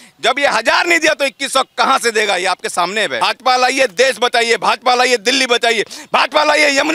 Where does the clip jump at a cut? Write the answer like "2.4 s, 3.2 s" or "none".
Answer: 3.2 s